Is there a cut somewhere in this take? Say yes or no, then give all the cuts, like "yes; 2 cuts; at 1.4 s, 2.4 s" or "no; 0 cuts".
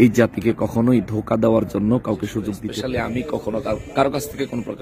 yes; 1 cut; at 2.7 s